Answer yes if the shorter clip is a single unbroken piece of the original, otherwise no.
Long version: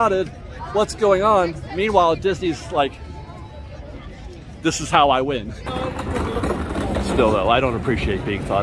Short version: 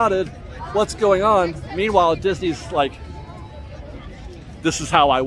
yes